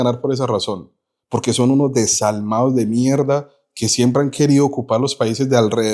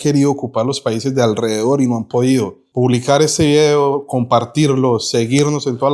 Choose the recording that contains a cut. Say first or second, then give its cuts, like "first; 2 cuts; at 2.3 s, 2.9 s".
second; 1 cut; at 2.6 s